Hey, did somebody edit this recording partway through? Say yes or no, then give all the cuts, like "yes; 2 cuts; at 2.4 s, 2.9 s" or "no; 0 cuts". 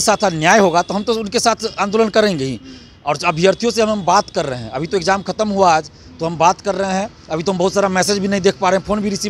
no; 0 cuts